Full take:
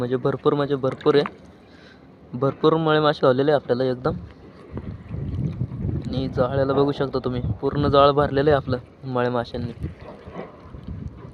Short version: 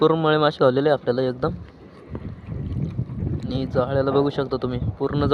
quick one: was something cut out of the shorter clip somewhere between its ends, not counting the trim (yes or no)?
no